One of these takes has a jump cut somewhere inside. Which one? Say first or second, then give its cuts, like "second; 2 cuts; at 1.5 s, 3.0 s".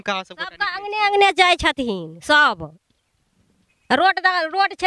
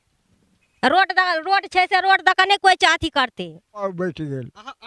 second; 1 cut; at 3.8 s